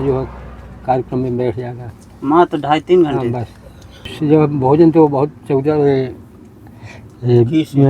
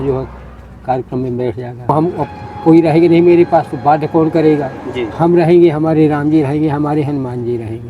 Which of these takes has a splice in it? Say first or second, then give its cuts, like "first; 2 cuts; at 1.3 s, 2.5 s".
second; 1 cut; at 1.9 s